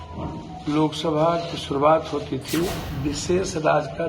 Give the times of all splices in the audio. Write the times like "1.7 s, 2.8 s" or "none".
2.9 s